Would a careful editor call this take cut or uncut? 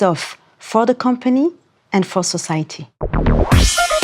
cut